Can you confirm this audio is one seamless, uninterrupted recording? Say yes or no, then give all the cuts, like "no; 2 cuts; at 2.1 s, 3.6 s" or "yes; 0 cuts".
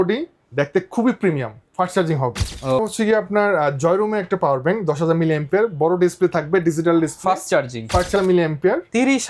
no; 2 cuts; at 2.8 s, 8.1 s